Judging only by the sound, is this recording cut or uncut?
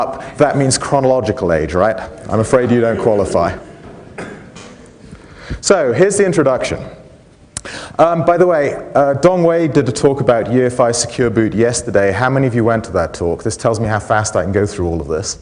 cut